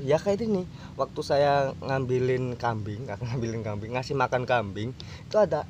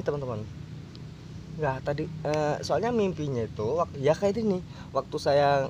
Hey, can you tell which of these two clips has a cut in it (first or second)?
first